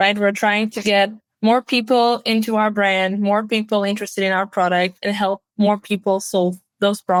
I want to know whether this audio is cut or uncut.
uncut